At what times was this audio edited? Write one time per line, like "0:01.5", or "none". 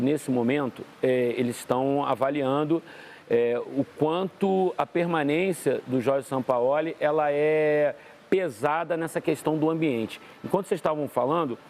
none